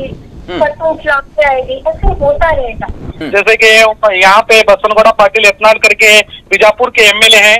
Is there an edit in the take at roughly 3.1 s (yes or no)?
yes